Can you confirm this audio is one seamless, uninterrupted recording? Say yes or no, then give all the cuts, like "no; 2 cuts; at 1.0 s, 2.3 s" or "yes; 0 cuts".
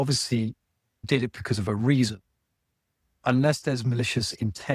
no; 1 cut; at 1.0 s